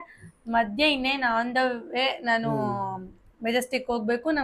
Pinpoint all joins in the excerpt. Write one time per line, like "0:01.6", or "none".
none